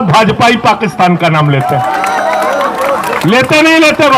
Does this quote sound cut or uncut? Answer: uncut